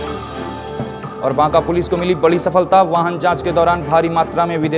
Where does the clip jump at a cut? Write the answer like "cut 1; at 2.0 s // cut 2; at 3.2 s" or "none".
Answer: cut 1; at 0.9 s